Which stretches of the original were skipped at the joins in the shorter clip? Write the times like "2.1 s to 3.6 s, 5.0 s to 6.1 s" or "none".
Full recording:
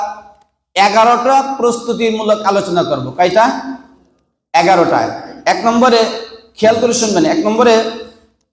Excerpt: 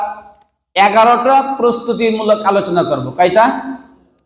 none